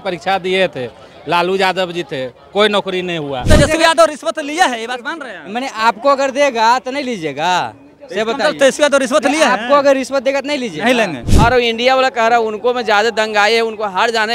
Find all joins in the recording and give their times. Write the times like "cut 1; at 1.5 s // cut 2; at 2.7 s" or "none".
cut 1; at 3.4 s // cut 2; at 11.2 s

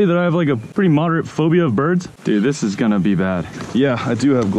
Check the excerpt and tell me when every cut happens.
cut 1; at 2.1 s

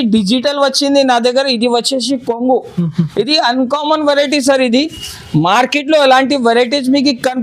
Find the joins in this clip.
none

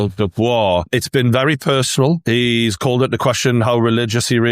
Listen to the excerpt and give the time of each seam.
cut 1; at 0.9 s // cut 2; at 2.2 s

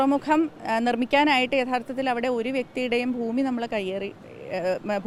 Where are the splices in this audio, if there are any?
none

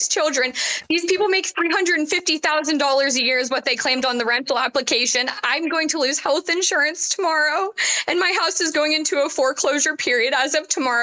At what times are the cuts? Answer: none

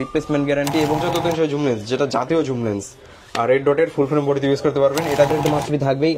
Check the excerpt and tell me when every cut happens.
cut 1; at 1.0 s // cut 2; at 5.3 s

